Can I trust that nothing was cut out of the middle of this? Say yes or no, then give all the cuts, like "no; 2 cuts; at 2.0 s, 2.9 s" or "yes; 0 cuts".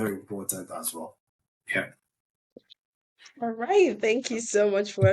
no; 1 cut; at 1.8 s